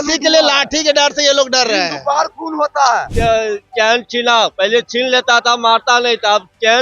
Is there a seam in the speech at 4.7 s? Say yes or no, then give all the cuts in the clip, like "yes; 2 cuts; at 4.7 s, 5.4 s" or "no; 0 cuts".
no; 1 cut; at 3.1 s